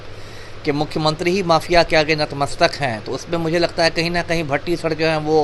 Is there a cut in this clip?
no; 0 cuts

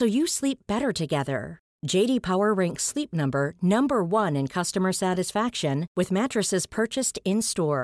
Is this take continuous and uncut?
yes; 0 cuts

